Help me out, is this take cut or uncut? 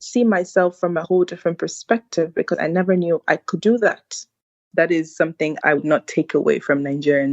cut